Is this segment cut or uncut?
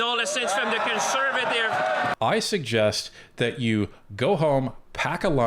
cut